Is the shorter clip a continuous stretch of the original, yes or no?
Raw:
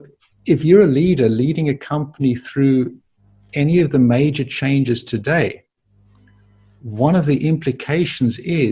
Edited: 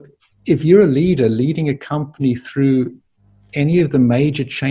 yes